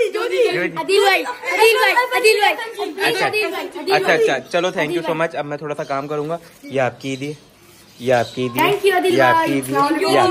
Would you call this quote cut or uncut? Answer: uncut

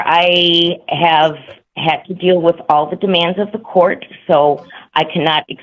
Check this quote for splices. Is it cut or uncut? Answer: uncut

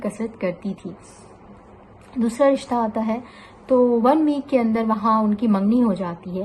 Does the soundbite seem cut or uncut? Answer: uncut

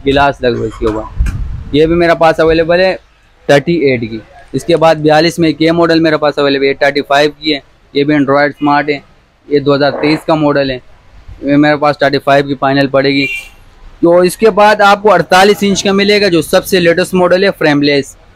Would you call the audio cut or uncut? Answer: uncut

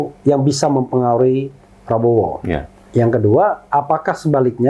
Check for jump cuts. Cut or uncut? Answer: cut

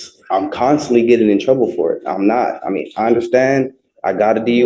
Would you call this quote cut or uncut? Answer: uncut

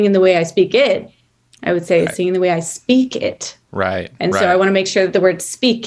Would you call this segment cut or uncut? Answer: uncut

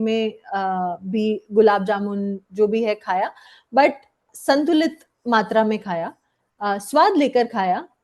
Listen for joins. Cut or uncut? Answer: cut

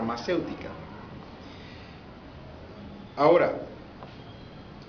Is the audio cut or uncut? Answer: cut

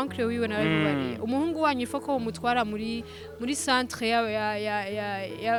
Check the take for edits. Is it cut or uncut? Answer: uncut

